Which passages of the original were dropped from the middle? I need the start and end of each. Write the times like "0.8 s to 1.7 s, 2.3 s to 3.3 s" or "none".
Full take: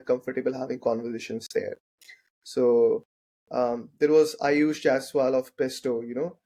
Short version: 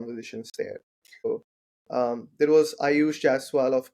2.2 s to 2.9 s

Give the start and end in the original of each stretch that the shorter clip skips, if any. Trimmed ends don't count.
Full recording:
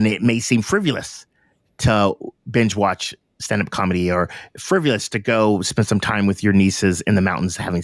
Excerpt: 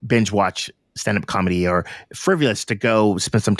none

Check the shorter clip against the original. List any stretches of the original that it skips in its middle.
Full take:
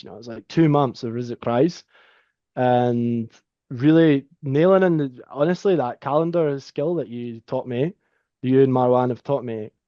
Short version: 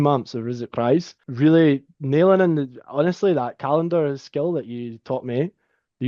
1.9 s to 3.6 s

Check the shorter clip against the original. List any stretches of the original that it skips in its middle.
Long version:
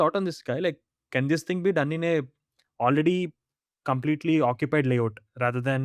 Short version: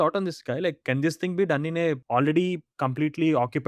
0.8 s to 1.1 s, 2.3 s to 2.7 s, 3.4 s to 3.7 s

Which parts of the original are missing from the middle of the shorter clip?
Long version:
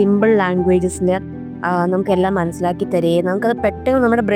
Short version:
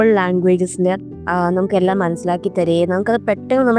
1.4 s to 1.5 s

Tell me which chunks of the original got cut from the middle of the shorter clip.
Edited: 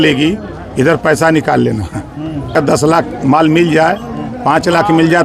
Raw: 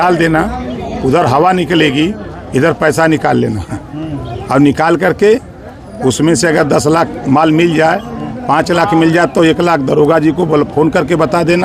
4.3 s to 6.6 s

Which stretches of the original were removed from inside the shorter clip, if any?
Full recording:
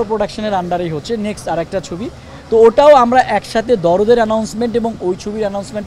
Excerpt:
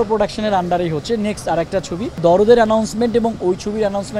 2.2 s to 3.8 s

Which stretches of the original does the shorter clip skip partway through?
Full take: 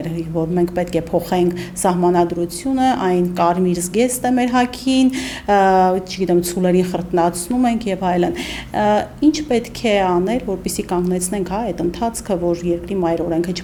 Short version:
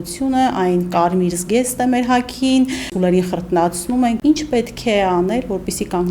5.4 s to 6.5 s, 7.8 s to 9.2 s

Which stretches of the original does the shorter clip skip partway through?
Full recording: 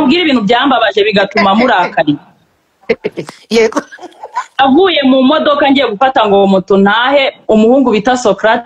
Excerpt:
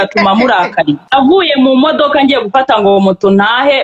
2.2 s to 4.5 s

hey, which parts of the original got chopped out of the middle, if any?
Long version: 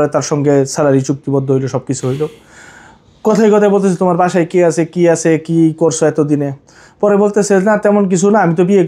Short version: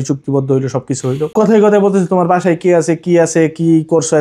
2.3 s to 3.2 s

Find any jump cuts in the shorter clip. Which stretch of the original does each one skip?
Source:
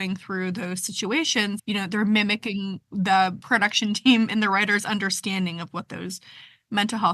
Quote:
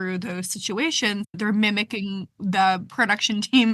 1.6 s to 1.8 s

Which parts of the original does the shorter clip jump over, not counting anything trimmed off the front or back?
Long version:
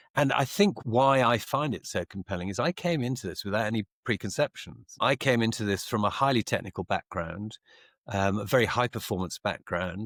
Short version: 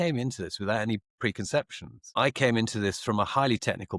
none

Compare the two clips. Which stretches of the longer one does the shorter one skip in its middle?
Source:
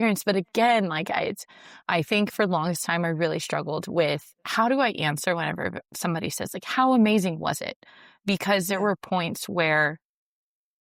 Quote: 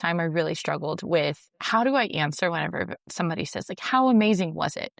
none

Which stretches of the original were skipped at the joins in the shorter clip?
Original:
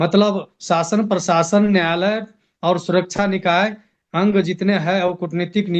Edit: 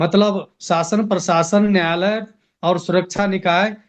none

